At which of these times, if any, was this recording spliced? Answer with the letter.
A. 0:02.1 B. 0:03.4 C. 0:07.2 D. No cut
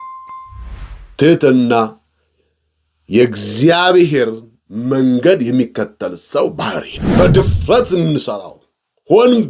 C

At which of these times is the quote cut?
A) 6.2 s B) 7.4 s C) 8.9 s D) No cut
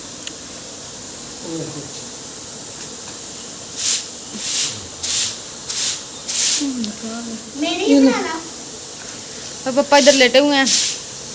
B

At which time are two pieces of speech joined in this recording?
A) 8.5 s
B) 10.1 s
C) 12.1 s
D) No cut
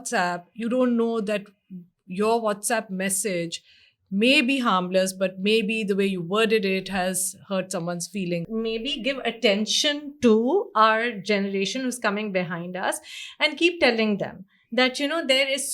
A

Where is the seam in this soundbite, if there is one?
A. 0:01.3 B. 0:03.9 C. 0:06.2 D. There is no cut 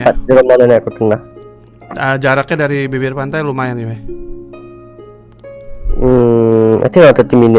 D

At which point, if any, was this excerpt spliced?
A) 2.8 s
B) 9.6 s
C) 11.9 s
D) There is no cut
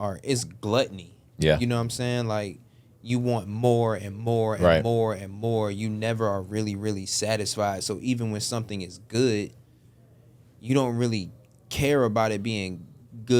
D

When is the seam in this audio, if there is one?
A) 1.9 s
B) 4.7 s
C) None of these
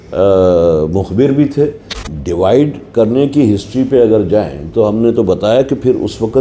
A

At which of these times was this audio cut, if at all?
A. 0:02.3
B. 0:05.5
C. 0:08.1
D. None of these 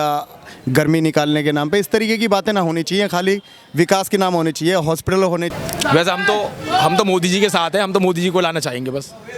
B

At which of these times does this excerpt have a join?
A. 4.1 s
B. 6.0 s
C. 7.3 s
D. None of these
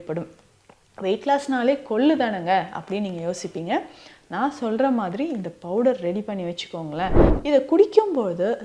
C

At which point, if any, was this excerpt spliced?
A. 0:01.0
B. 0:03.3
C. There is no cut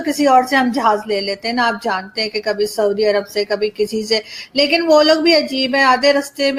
C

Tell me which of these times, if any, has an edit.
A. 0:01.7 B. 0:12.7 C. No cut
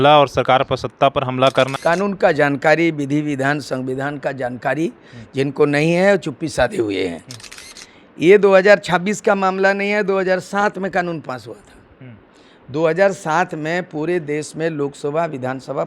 A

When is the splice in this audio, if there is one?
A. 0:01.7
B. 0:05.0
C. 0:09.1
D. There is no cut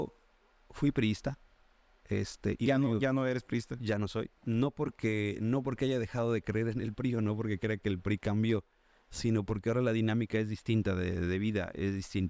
D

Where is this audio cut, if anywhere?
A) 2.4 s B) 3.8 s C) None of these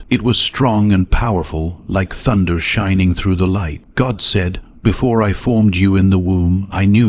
B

